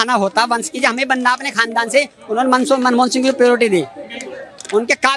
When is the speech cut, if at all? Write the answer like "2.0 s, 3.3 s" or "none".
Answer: none

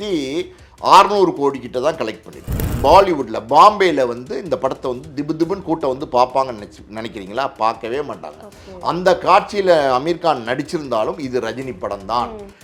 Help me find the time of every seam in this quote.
2.6 s

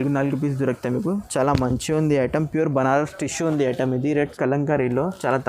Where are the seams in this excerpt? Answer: 4.3 s

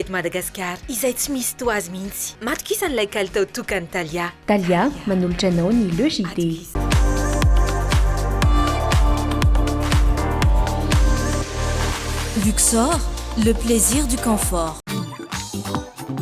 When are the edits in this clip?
14.8 s

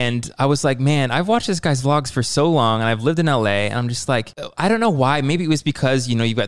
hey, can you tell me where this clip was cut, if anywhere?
4.4 s

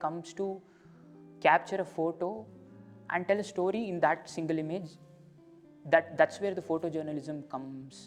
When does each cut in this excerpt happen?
none

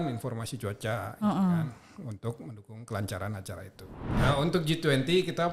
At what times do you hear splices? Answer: 4.1 s

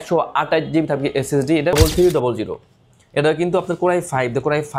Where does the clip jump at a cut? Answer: 1.7 s

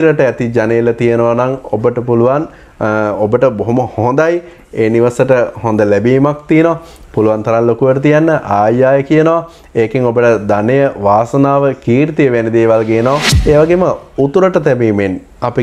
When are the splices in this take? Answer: 13.3 s

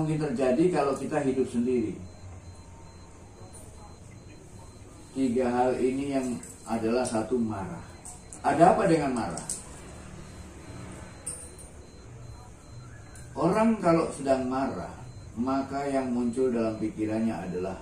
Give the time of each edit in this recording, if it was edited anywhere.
3.3 s, 8.3 s

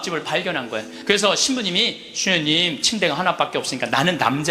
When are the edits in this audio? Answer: 0.9 s

